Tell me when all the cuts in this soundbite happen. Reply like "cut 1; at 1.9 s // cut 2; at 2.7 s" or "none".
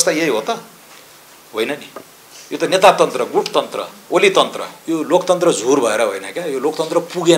cut 1; at 4.7 s